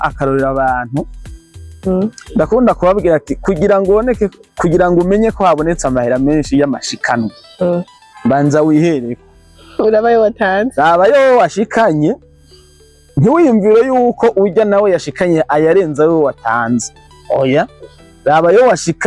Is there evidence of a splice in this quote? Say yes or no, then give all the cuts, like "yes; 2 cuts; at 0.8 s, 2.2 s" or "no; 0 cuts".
no; 0 cuts